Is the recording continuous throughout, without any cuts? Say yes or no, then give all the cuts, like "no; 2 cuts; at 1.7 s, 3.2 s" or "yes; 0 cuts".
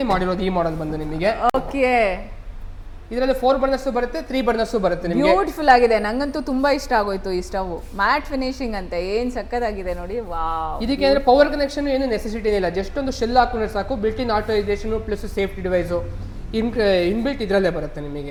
yes; 0 cuts